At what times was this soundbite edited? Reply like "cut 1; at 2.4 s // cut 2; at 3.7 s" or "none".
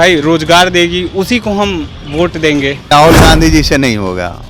cut 1; at 2.9 s